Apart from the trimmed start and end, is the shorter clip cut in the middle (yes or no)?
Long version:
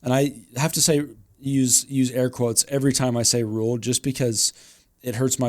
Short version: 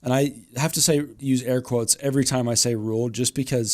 yes